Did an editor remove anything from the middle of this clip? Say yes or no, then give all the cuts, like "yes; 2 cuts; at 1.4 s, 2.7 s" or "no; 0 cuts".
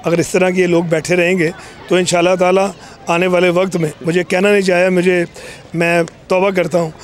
no; 0 cuts